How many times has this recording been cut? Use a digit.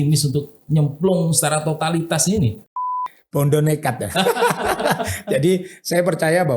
1